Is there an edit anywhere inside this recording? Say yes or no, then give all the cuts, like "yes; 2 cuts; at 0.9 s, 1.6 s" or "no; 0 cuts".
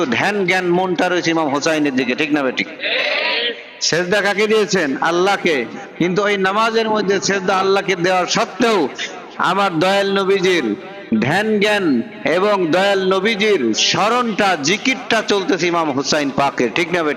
no; 0 cuts